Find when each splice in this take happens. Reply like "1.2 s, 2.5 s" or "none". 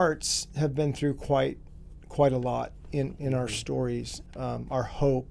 4.2 s